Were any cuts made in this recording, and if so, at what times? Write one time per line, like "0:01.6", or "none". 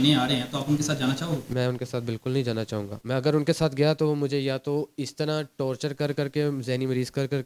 none